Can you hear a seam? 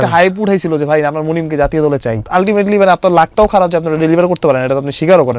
yes; 1 cut; at 2.3 s

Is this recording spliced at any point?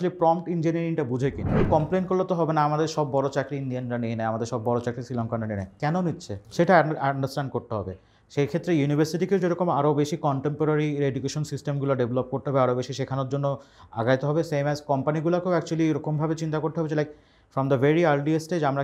yes; 2 cuts; at 1.6 s, 6.3 s

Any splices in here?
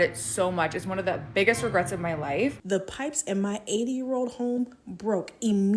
yes; 1 cut; at 2.6 s

